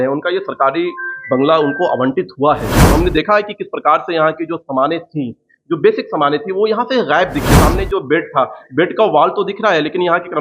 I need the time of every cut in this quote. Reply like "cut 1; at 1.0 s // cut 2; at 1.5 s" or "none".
cut 1; at 2.9 s // cut 2; at 7.6 s